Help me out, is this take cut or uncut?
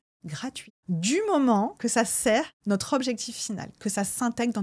cut